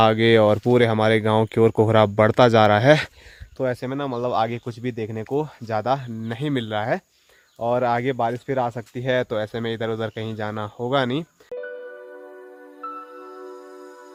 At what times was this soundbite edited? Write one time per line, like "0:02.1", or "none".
none